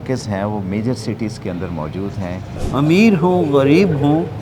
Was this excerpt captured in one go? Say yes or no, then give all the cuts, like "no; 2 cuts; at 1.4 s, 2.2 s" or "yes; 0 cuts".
no; 1 cut; at 2.5 s